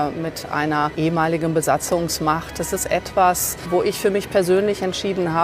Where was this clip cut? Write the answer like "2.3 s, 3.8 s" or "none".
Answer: 0.9 s, 3.5 s